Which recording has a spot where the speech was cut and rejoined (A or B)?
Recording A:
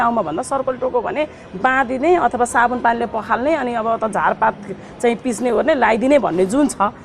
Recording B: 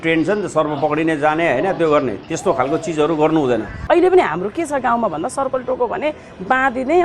B